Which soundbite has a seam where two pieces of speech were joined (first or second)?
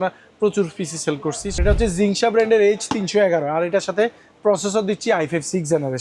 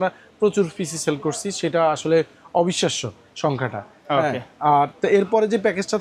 first